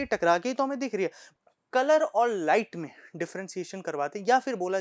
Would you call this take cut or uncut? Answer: cut